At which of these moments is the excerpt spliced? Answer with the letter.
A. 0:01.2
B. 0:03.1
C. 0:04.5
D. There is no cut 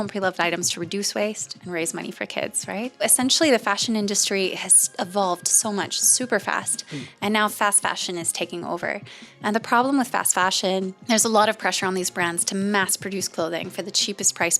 B